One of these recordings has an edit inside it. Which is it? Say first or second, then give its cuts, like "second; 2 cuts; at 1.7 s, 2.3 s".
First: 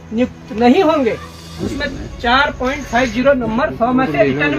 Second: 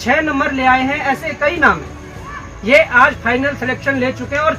first; 1 cut; at 1.6 s